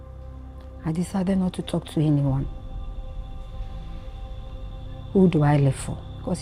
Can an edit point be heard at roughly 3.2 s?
no; 0 cuts

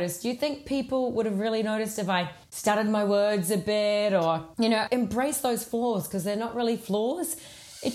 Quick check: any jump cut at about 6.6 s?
no; 1 cut; at 4.8 s

